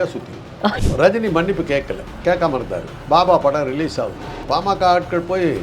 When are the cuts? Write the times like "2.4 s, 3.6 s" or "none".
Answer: 0.8 s, 2.0 s, 2.9 s, 4.3 s